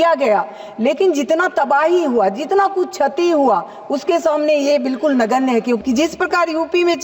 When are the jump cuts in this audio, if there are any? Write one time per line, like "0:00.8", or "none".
0:05.8